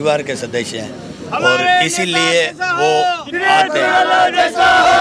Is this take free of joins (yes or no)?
yes